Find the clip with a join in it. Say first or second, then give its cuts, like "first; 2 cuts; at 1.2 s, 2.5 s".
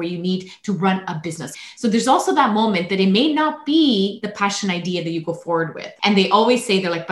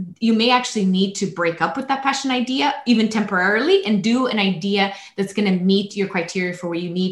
first; 2 cuts; at 1.5 s, 5.8 s